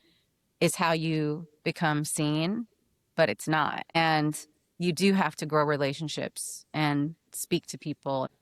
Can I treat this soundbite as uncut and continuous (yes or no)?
yes